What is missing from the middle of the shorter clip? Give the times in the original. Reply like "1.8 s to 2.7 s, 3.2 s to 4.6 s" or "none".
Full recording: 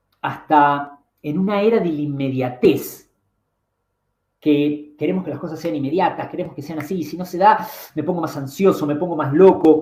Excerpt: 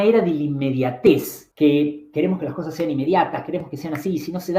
3.0 s to 4.2 s